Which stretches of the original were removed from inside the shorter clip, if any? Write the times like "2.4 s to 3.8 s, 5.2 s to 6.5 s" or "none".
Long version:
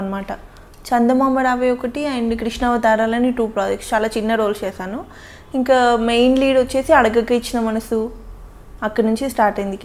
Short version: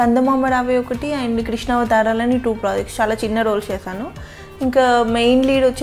none